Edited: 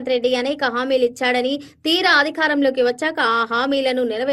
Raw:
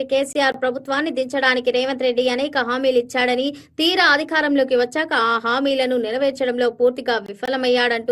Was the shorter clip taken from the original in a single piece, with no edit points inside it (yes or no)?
yes